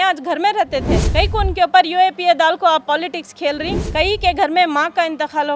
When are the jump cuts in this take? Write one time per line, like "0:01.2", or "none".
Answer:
0:01.0
0:03.8